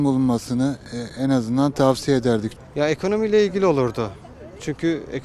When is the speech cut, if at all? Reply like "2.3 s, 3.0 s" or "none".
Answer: 2.5 s